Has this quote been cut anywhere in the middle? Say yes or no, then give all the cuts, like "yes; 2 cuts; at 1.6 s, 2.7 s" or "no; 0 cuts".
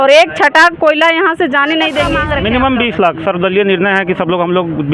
yes; 1 cut; at 2.2 s